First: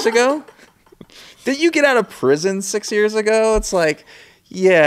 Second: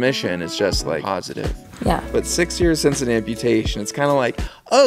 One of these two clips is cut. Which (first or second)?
second